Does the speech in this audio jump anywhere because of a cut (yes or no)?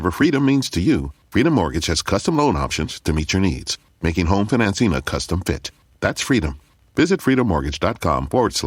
no